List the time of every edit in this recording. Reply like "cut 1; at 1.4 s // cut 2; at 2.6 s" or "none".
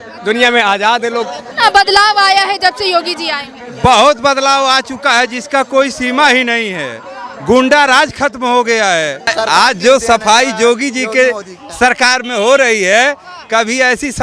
cut 1; at 1.4 s // cut 2; at 9.3 s